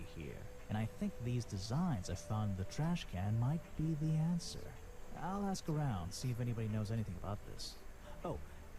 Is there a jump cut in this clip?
yes; 1 cut; at 1.2 s

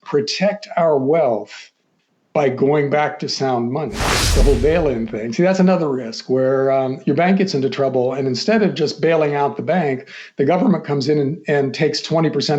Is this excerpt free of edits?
no; 1 cut; at 4.3 s

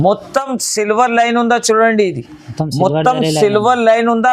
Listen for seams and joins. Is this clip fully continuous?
yes; 0 cuts

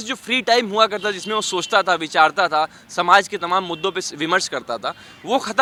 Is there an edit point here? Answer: no; 0 cuts

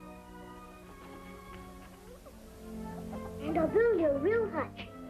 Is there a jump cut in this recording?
no; 0 cuts

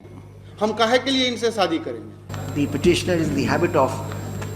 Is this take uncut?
no; 1 cut; at 2.4 s

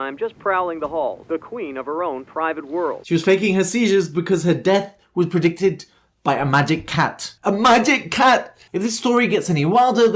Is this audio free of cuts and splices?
yes; 0 cuts

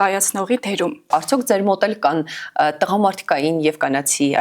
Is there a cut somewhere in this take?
yes; 1 cut; at 1.1 s

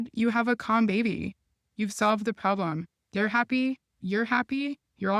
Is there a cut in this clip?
no; 0 cuts

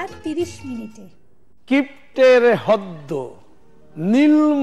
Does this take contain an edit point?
yes; 1 cut; at 1.4 s

